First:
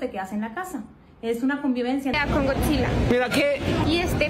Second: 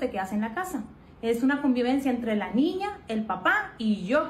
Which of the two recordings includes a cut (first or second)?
first